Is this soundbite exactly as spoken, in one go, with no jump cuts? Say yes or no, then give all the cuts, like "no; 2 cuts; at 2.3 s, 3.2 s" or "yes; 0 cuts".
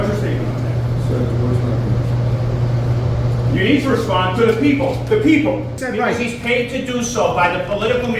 no; 1 cut; at 5.8 s